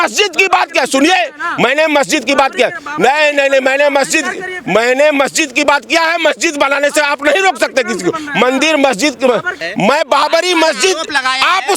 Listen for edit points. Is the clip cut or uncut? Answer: cut